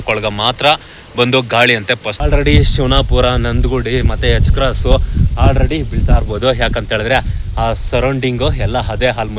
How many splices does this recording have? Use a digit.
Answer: 1